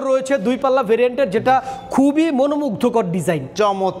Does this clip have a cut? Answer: no; 0 cuts

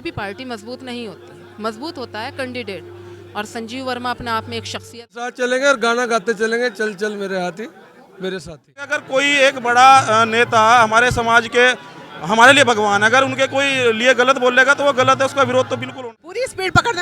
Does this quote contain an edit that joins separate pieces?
yes; 3 cuts; at 5.3 s, 9.0 s, 15.9 s

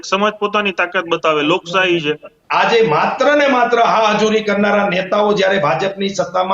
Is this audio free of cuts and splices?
no; 1 cut; at 2.3 s

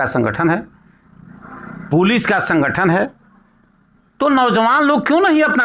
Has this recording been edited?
no; 0 cuts

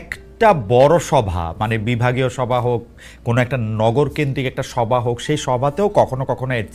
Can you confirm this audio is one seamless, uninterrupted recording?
yes; 0 cuts

